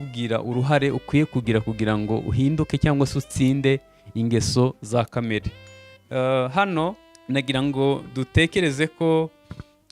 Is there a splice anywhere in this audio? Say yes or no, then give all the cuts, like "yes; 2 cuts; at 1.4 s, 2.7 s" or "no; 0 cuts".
yes; 1 cut; at 7.1 s